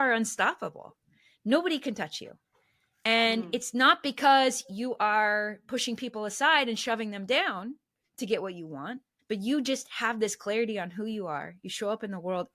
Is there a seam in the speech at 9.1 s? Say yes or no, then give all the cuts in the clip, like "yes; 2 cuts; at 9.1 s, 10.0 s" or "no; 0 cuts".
yes; 1 cut; at 9.1 s